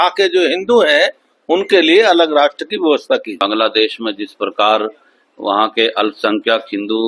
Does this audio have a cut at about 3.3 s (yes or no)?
yes